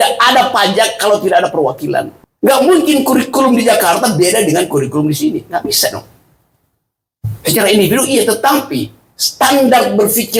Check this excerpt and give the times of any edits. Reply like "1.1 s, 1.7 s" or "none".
2.2 s